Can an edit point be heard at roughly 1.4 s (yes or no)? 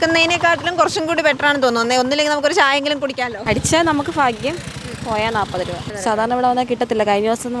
no